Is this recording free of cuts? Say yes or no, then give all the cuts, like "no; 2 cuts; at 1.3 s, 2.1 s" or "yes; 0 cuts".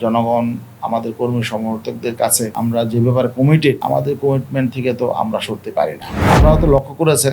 no; 3 cuts; at 2.5 s, 3.8 s, 6.1 s